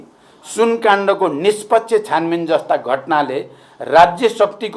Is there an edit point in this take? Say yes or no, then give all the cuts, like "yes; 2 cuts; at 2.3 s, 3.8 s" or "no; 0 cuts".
no; 0 cuts